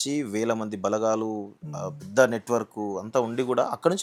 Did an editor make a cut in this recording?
no; 0 cuts

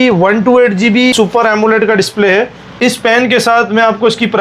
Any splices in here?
yes; 2 cuts; at 1.1 s, 2.8 s

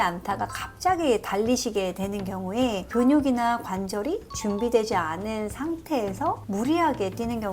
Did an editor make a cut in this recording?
no; 0 cuts

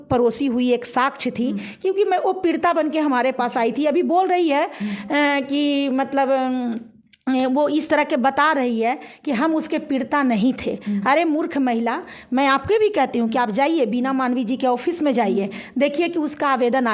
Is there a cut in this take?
no; 0 cuts

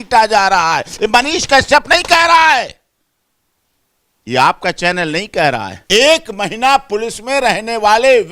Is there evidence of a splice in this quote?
yes; 1 cut; at 5.8 s

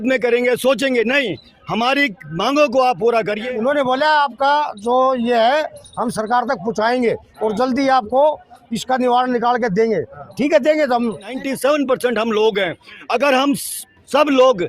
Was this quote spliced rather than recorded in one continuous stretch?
yes; 2 cuts; at 3.4 s, 11.4 s

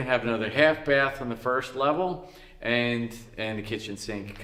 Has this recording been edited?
no; 0 cuts

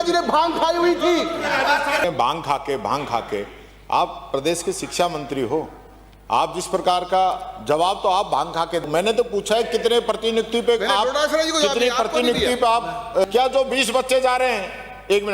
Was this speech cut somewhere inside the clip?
yes; 3 cuts; at 2.0 s, 8.8 s, 13.2 s

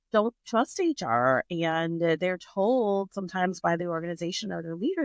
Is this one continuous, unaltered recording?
yes; 0 cuts

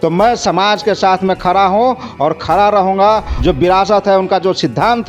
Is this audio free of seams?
no; 1 cut; at 3.3 s

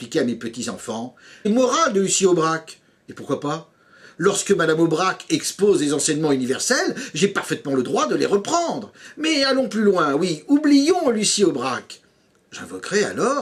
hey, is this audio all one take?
yes; 0 cuts

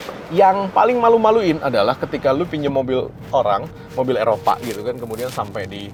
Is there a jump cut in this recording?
no; 0 cuts

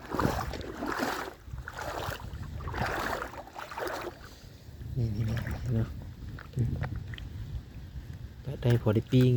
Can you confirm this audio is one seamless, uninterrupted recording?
yes; 0 cuts

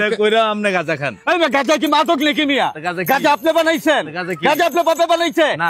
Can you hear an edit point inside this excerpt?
no; 0 cuts

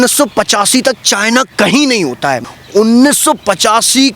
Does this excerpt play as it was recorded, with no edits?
no; 1 cut; at 2.4 s

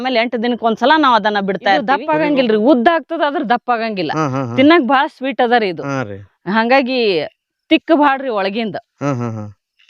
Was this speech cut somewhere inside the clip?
yes; 1 cut; at 2.0 s

